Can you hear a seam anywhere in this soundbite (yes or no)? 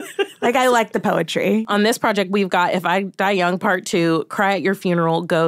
yes